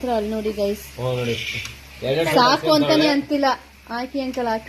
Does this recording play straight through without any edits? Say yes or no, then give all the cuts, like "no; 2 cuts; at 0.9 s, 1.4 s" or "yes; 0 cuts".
yes; 0 cuts